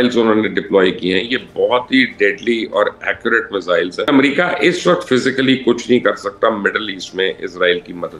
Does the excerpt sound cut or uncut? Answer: cut